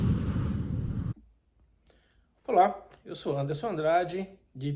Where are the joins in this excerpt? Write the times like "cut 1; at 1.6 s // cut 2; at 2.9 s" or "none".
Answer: cut 1; at 1.1 s

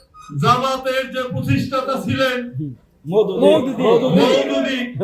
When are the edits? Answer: none

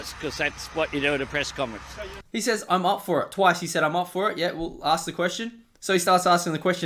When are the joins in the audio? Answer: none

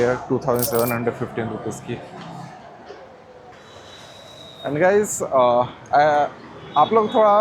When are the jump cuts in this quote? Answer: cut 1; at 3.5 s

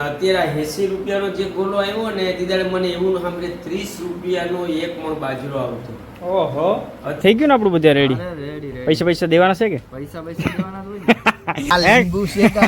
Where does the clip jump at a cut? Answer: cut 1; at 7.2 s // cut 2; at 11.7 s

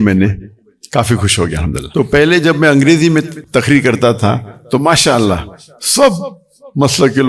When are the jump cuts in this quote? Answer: cut 1; at 1.8 s // cut 2; at 3.4 s

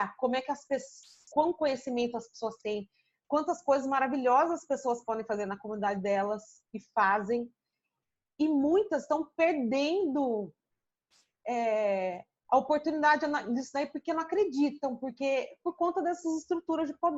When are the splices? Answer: none

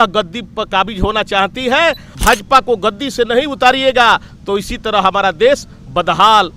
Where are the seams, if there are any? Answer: cut 1; at 2.1 s

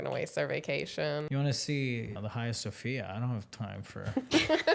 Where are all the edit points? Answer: cut 1; at 1.3 s // cut 2; at 2.2 s

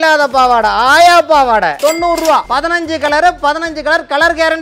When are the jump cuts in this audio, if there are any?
cut 1; at 1.8 s

